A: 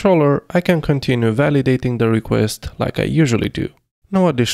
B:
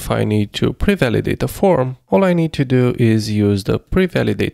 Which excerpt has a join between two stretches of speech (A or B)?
B